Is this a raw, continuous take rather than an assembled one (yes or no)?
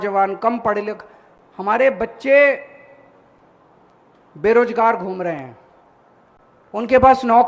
yes